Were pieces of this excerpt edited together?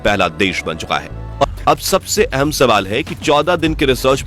yes; 1 cut; at 1.4 s

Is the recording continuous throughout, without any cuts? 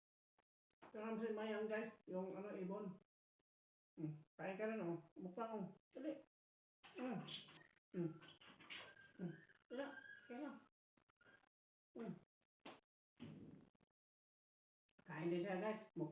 no; 1 cut; at 7.6 s

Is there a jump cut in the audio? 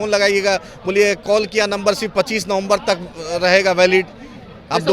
no; 0 cuts

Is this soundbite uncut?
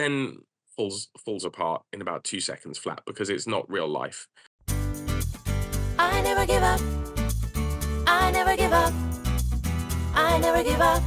no; 1 cut; at 4.7 s

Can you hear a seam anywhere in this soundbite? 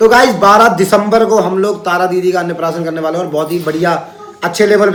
no; 0 cuts

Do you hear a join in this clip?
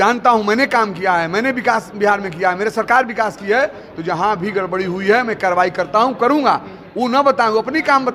no; 0 cuts

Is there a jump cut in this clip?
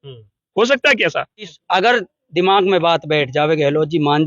yes; 1 cut; at 1.5 s

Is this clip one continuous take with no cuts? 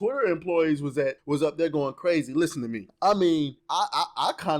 no; 3 cuts; at 1.2 s, 2.8 s, 3.6 s

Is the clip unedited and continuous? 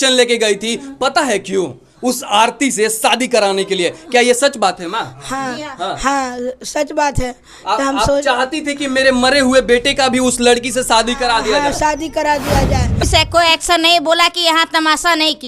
no; 1 cut; at 13.0 s

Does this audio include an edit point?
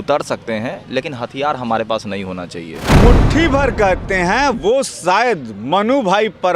yes; 1 cut; at 2.9 s

